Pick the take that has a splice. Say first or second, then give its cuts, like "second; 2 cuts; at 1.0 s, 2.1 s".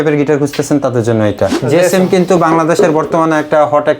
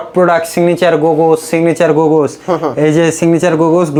first; 1 cut; at 1.6 s